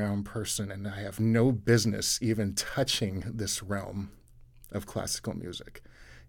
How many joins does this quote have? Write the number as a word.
one